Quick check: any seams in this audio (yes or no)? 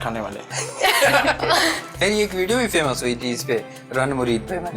yes